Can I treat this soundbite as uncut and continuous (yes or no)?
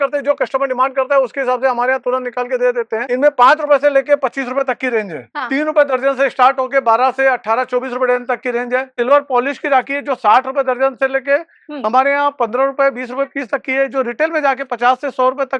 no